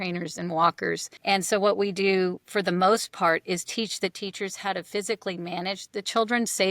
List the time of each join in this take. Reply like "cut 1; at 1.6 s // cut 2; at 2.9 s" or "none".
cut 1; at 1.1 s